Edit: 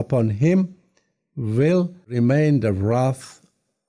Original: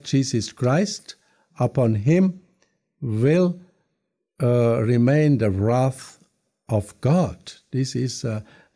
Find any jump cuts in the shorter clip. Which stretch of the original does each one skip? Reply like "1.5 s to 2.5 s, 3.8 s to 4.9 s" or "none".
3.8 s to 4.9 s